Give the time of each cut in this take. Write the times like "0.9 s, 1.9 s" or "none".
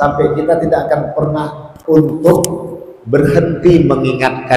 1.7 s